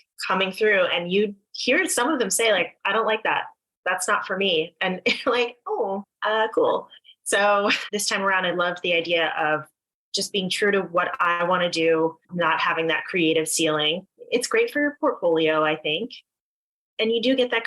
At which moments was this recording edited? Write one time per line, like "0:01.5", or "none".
0:06.1
0:07.9
0:12.2
0:14.1